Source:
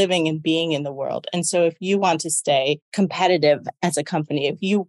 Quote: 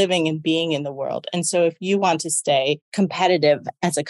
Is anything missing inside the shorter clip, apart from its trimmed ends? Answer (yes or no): no